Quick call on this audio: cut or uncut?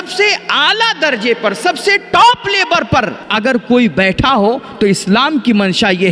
cut